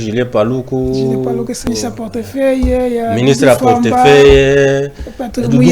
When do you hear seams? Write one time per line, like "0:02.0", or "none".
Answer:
0:01.6